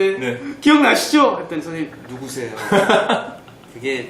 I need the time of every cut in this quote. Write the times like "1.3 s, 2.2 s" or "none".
2.9 s